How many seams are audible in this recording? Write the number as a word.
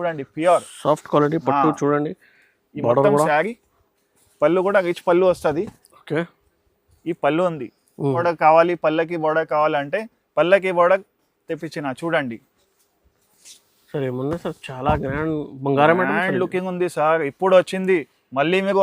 one